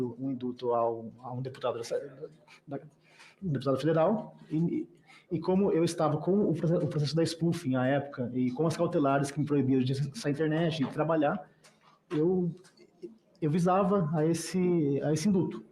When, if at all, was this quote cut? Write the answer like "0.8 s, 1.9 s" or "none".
none